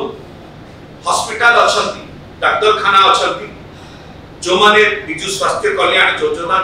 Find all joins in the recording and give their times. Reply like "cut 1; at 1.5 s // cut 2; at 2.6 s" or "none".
none